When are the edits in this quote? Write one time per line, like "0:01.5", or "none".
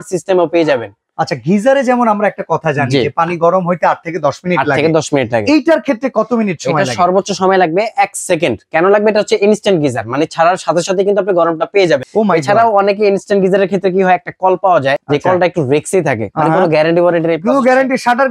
none